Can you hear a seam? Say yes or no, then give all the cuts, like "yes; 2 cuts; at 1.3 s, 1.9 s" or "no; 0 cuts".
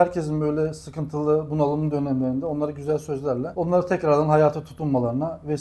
yes; 1 cut; at 3.5 s